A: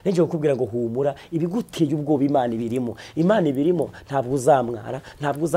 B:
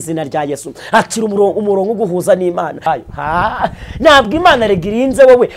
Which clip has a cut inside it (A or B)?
B